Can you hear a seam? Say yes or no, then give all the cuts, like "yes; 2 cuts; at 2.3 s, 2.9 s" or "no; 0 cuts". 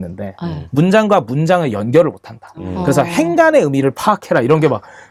no; 0 cuts